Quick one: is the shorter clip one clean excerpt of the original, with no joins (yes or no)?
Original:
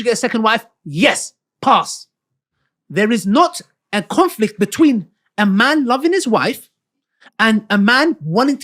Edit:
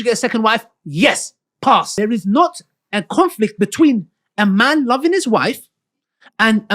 no